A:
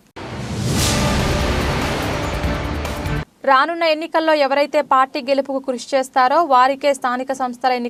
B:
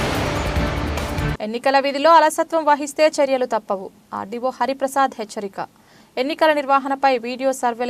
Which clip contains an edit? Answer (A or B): B